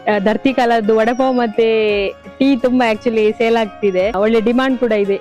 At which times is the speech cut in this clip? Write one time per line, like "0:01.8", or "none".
0:04.1

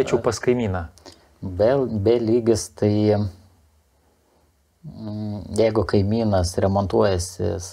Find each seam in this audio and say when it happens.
none

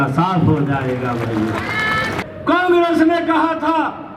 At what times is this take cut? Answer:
none

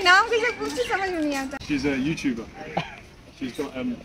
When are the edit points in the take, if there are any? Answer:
0:01.5

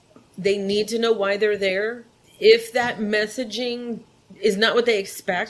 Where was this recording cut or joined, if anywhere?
0:02.2

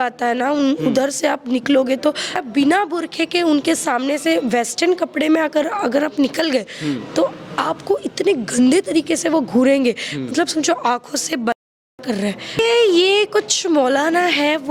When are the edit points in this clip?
0:02.4
0:12.6

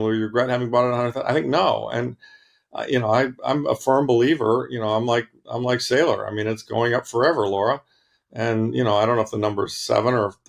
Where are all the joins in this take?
none

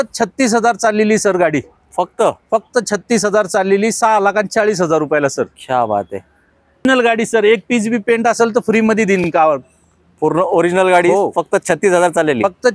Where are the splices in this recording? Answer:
none

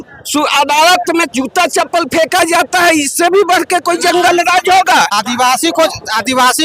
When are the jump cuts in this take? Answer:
0:05.1

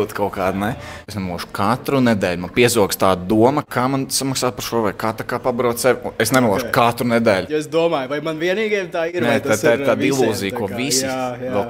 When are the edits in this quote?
0:01.0
0:03.7
0:07.5

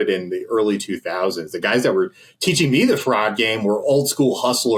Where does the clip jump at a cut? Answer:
none

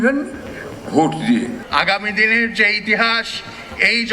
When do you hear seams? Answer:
0:01.6

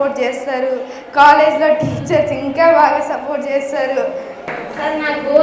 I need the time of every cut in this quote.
0:04.4

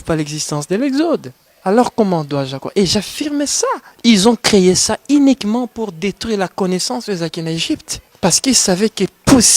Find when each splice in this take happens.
0:03.9
0:08.0

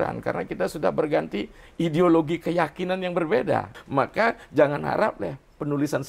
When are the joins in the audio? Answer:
0:03.7

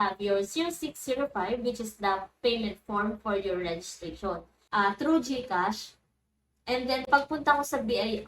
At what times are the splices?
0:04.5

